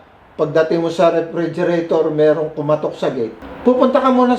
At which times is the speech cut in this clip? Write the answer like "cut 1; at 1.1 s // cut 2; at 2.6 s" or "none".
cut 1; at 3.4 s